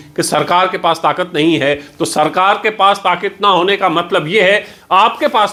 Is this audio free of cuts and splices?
yes; 0 cuts

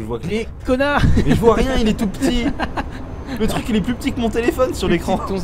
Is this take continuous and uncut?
yes; 0 cuts

